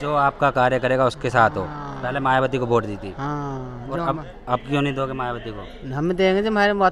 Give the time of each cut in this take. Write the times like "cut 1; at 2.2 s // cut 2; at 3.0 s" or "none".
none